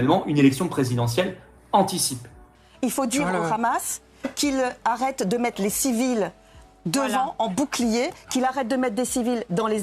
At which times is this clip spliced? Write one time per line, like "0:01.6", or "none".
0:02.6